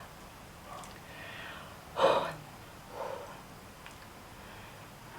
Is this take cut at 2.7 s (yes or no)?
yes